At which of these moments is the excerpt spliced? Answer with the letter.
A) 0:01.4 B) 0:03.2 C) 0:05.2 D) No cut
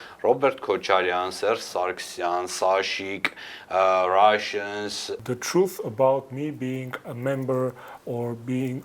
C